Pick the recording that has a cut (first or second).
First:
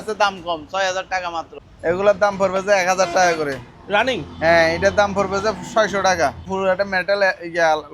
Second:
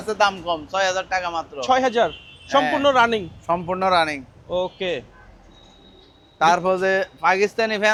first